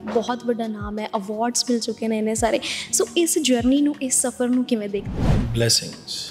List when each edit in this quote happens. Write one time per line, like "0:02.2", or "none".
0:05.3